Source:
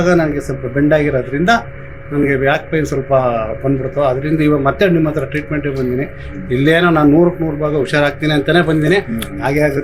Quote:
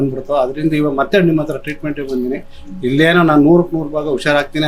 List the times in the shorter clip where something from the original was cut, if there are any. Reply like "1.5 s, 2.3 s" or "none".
none